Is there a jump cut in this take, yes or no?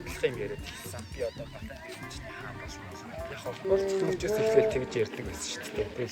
no